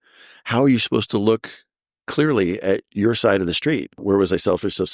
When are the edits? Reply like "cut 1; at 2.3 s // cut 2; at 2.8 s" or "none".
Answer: cut 1; at 4.0 s